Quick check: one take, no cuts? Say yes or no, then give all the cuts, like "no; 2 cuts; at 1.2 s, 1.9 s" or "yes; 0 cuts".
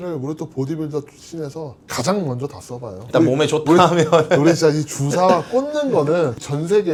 yes; 0 cuts